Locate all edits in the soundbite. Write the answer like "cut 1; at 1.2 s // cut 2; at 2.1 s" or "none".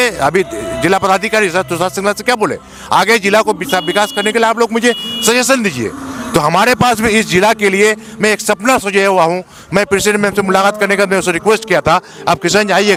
none